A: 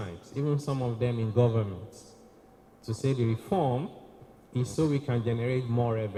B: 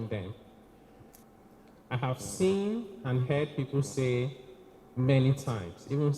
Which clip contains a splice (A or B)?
B